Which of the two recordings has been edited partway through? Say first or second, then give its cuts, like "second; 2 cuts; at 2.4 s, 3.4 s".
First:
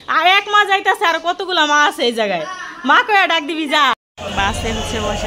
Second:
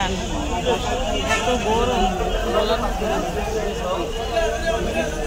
first; 1 cut; at 4.1 s